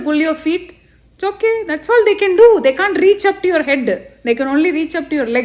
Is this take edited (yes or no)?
no